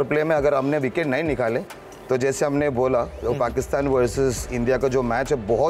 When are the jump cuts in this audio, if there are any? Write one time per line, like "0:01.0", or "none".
none